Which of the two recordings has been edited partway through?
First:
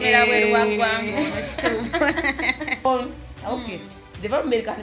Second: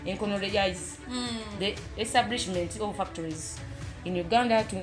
first; 1 cut; at 2.8 s

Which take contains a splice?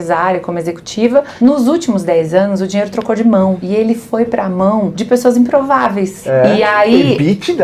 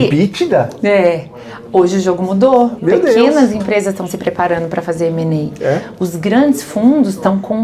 first; 4 cuts; at 1.3 s, 3.6 s, 5.0 s, 6.2 s

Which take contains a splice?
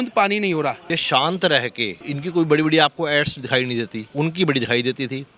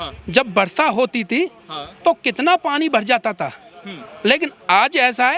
first; 3 cuts; at 0.9 s, 2.0 s, 4.0 s

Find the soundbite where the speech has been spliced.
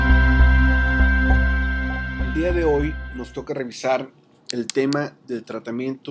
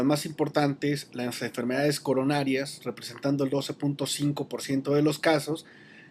second; 1 cut; at 4.6 s

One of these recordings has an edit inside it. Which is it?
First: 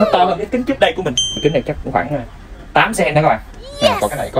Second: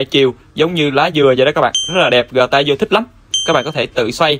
first; 1 cut; at 1.4 s

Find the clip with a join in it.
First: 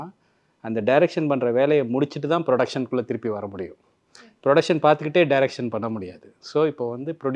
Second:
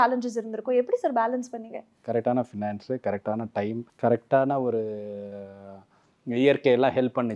second; 2 cuts; at 1.9 s, 3.9 s

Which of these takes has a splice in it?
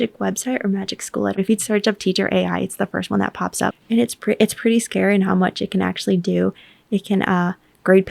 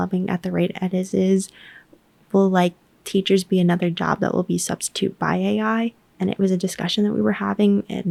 first; 2 cuts; at 1.3 s, 3.7 s

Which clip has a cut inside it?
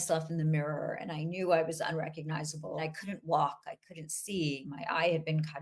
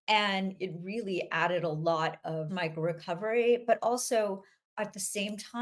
first; 2 cuts; at 2.8 s, 4.7 s

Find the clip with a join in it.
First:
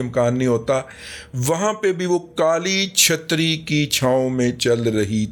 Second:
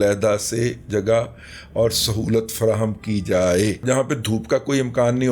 second; 1 cut; at 3.8 s

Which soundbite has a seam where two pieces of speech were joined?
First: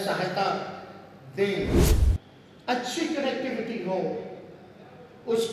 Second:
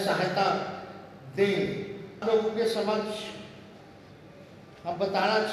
first; 1 cut; at 2.0 s

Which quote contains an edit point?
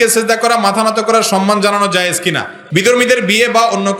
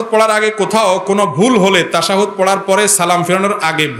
first; 1 cut; at 2.6 s

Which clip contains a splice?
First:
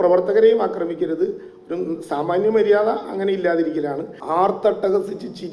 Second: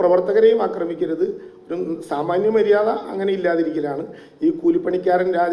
first; 1 cut; at 4.1 s

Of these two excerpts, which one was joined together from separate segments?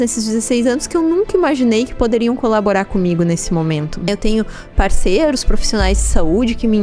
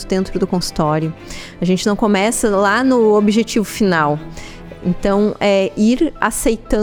first; 1 cut; at 4.1 s

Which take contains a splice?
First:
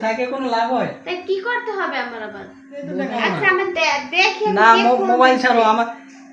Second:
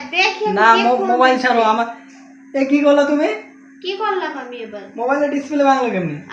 first; 1 cut; at 3.0 s

